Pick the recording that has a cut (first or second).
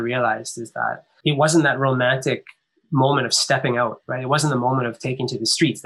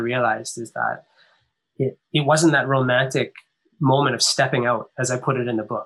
first